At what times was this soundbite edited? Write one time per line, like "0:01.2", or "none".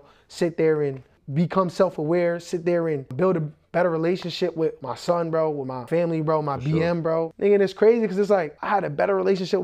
0:03.1
0:04.8
0:05.8
0:07.3
0:08.6